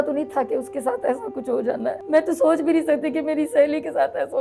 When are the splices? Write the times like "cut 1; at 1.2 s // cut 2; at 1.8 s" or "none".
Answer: cut 1; at 2.0 s